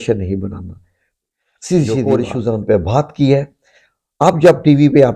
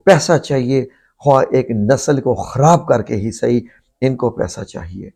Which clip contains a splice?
first; 1 cut; at 2.1 s

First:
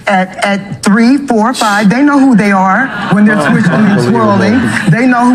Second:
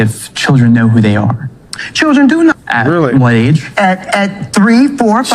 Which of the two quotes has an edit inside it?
second; 1 cut; at 2.5 s

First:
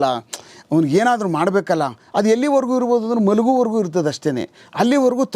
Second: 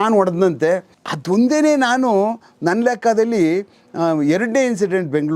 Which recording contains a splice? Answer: second; 1 cut; at 0.9 s

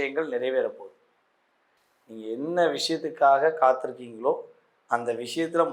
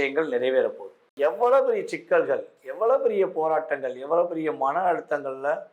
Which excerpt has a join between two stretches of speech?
second; 1 cut; at 1.1 s

